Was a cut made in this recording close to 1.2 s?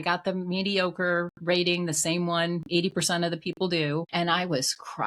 no; 1 cut; at 4.1 s

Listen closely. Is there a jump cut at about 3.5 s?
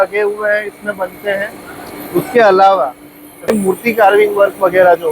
yes; 1 cut; at 3.5 s

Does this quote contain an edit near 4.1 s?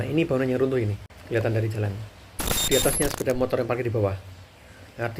no; 2 cuts; at 1.1 s, 2.6 s

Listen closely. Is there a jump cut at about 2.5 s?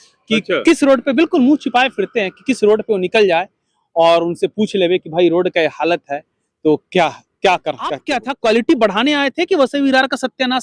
no; 1 cut; at 8.1 s

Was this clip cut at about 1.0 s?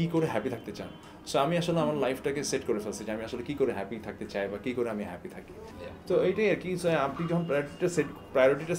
no; 0 cuts

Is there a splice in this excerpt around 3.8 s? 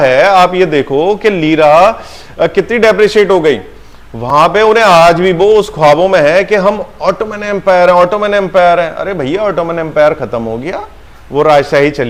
no; 0 cuts

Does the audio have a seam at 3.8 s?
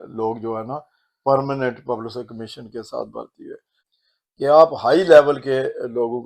yes; 1 cut; at 3.8 s

